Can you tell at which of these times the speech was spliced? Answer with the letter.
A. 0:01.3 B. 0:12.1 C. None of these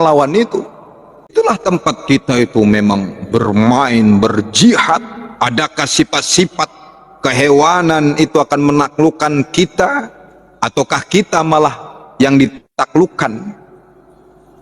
A